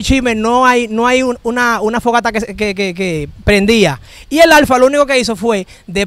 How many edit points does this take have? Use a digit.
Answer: 0